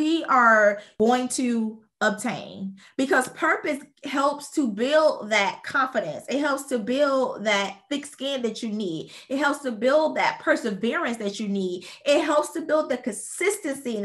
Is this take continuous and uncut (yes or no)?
no